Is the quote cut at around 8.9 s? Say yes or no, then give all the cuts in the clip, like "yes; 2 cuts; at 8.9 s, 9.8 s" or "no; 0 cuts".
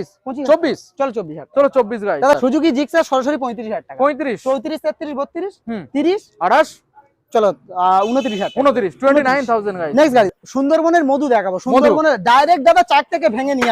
no; 2 cuts; at 2.4 s, 10.4 s